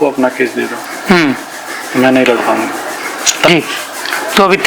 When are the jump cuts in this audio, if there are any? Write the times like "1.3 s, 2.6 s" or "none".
3.5 s